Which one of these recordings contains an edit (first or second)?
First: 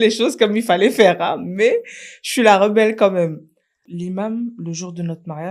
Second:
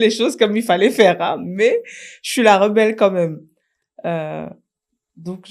first